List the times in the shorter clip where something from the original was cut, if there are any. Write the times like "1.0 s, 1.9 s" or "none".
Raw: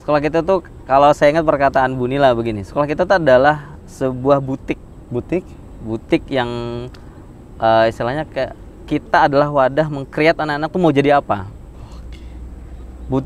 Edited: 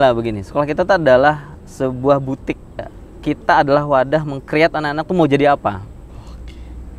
2.9 s